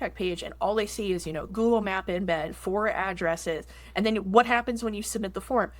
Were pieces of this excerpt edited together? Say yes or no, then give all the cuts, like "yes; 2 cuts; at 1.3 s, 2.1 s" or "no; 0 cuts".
yes; 1 cut; at 1.5 s